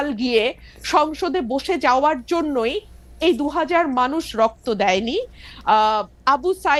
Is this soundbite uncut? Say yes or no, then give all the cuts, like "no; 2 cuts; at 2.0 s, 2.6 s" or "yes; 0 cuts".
yes; 0 cuts